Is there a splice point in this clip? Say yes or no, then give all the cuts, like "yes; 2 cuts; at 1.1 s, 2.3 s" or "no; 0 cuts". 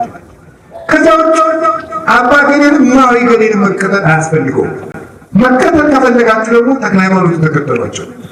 no; 0 cuts